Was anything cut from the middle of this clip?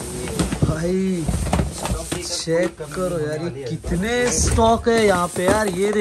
no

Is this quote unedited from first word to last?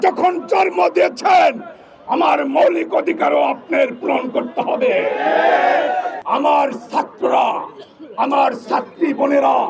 no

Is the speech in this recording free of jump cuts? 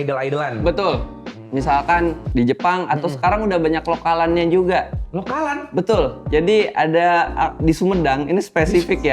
no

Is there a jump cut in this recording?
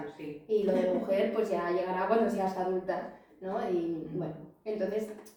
no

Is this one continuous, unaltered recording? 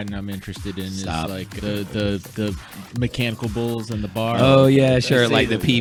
yes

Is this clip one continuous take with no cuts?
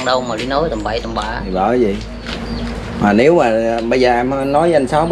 yes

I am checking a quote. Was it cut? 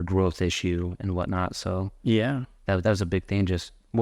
no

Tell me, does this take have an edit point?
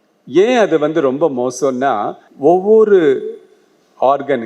yes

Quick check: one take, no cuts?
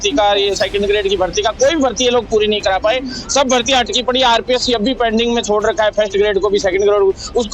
yes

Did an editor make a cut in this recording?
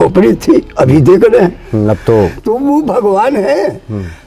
no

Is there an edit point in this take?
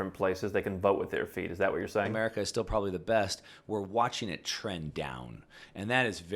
yes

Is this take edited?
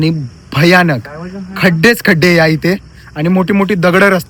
no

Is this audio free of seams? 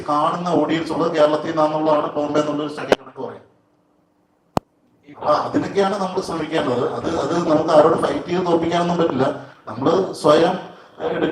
yes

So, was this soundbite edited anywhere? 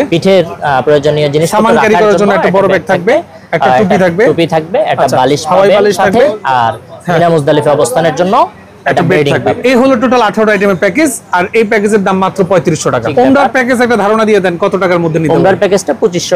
yes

